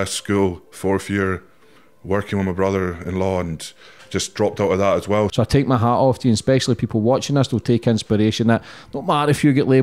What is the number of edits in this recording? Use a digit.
1